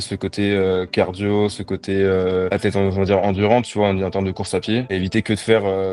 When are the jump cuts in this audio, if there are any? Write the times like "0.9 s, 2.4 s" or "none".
none

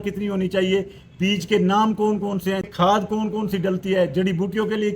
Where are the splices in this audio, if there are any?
2.6 s

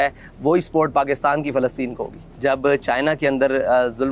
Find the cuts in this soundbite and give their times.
2.2 s

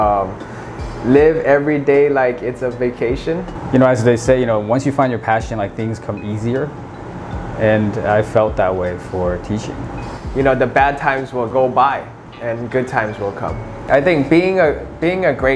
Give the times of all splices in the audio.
3.5 s, 10.2 s, 13.8 s

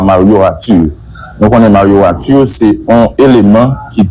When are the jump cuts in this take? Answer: 2.8 s

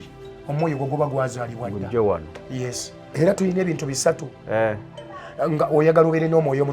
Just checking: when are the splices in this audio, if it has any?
3.1 s

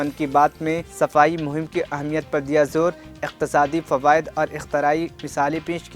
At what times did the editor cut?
none

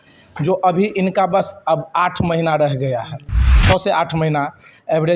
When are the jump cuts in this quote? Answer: none

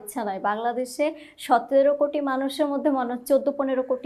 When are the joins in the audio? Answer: none

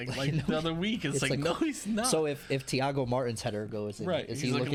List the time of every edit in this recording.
none

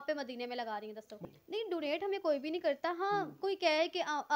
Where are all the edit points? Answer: 1.2 s

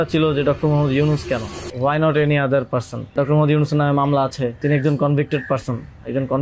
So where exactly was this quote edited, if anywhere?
1.6 s, 3.1 s, 4.6 s

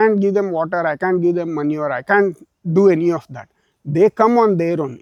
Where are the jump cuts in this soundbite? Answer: none

